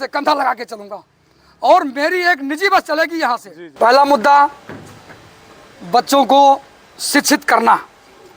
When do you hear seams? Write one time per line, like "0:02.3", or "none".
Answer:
0:03.6